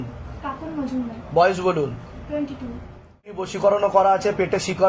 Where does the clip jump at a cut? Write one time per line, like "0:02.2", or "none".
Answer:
0:03.5